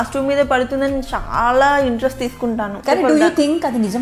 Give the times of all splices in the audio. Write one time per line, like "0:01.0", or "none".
0:02.8